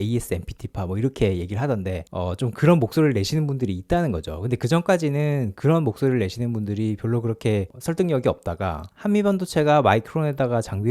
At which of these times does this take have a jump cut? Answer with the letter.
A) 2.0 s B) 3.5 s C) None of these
A